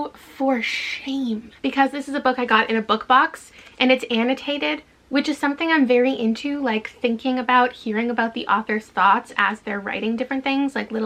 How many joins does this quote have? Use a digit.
0